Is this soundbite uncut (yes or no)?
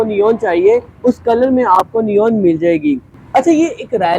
no